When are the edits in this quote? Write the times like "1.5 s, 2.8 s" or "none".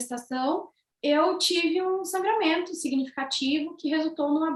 none